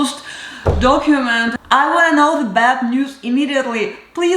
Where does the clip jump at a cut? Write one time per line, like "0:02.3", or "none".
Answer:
0:01.5

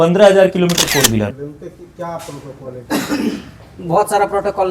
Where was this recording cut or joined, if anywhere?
0:01.3

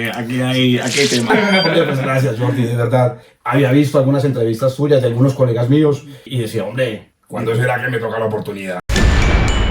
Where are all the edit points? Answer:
0:01.3
0:03.3
0:06.3
0:07.1
0:08.9

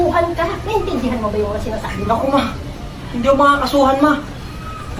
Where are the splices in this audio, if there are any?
none

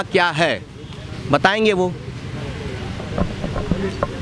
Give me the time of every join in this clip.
none

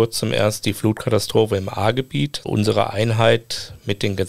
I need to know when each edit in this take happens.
0:02.4

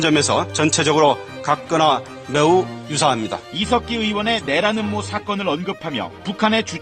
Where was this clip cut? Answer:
none

